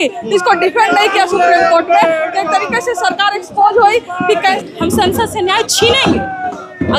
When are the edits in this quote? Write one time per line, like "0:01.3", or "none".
0:04.6

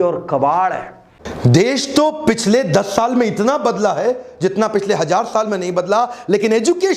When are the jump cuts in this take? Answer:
0:01.2

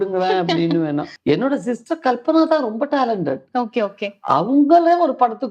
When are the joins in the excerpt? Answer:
0:01.1

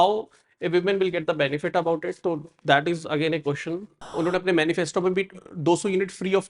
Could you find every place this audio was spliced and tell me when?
0:04.1

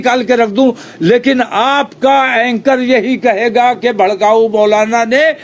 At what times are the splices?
none

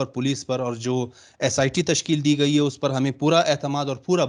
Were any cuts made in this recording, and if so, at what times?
none

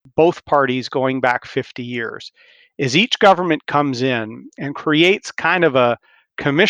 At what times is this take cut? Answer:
none

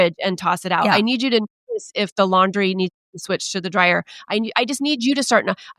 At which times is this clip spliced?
none

